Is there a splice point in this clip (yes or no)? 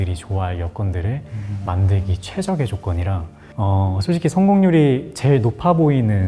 no